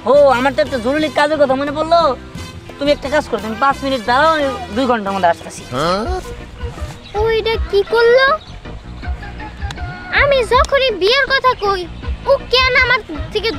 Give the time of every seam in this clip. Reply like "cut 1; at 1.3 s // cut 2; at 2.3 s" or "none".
none